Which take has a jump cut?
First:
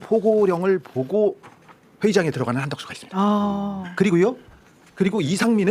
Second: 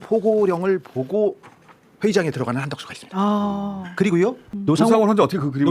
second; 1 cut; at 4.5 s

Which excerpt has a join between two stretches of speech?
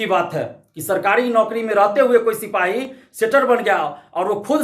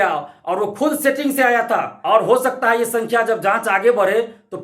second; 1 cut; at 1.9 s

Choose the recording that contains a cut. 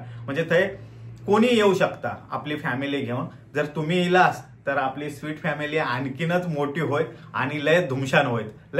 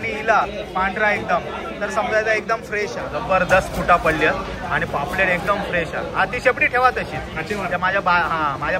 second; 1 cut; at 3.1 s

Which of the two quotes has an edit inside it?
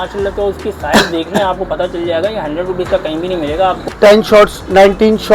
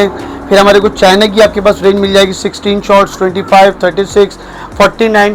first; 1 cut; at 3.8 s

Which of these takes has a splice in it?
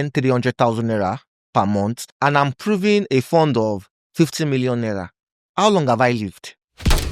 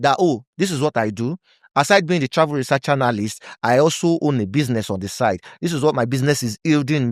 first; 1 cut; at 2.0 s

